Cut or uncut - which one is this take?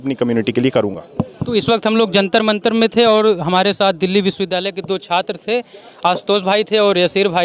uncut